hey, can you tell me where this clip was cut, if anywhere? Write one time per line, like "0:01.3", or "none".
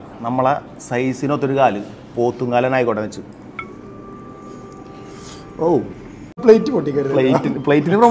0:06.3